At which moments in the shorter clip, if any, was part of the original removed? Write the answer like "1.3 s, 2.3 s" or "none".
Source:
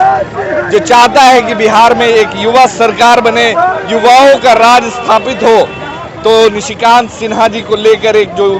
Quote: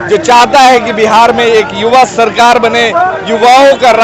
none